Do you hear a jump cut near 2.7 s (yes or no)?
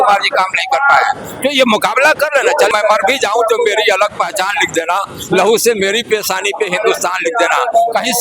yes